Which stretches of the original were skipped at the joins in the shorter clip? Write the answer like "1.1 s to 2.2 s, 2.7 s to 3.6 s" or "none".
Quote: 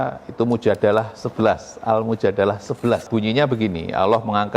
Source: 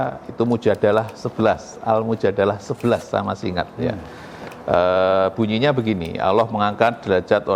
3.1 s to 5.3 s